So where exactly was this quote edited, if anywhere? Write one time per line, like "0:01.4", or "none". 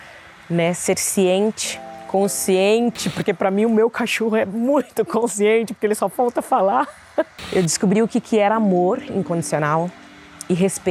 0:07.4

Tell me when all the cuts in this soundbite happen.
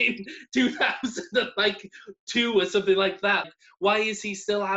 0:03.5

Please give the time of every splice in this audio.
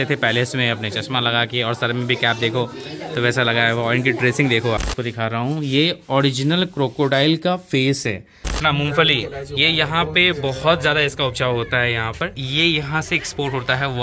0:04.9
0:08.4
0:12.4

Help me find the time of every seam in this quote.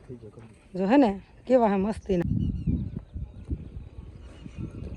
0:02.2

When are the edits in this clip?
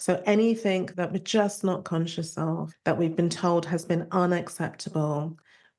0:00.9
0:02.7

